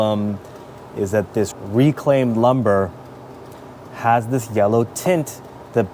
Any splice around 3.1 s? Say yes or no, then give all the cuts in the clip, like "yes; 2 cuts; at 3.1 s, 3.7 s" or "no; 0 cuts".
no; 1 cut; at 1.5 s